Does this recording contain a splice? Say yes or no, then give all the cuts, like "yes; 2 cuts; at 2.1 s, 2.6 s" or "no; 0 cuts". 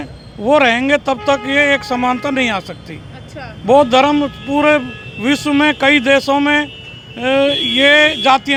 no; 0 cuts